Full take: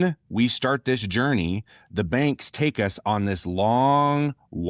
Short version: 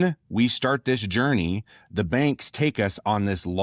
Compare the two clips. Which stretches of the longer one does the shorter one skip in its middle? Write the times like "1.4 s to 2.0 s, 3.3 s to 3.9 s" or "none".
none